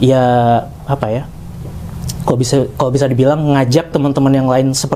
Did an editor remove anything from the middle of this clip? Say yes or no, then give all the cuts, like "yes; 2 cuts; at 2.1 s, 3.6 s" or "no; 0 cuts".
no; 0 cuts